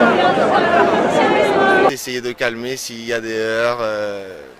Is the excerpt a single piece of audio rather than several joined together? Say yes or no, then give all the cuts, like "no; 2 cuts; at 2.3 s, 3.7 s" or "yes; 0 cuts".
no; 1 cut; at 1.9 s